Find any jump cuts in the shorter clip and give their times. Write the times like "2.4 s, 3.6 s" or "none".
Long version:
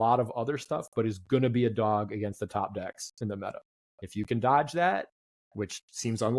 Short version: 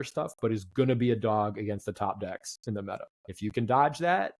3.2 s